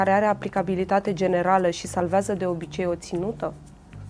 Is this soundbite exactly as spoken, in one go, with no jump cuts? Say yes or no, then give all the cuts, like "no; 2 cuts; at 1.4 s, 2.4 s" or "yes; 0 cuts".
yes; 0 cuts